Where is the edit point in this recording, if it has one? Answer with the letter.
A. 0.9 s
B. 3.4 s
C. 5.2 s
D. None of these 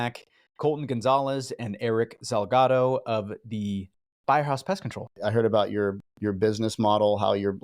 C